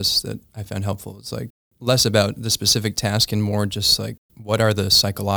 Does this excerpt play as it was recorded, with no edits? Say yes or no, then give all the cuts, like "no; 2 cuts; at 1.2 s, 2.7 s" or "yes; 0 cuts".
no; 1 cut; at 1.7 s